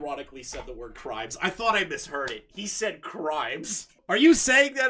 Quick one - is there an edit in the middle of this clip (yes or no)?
no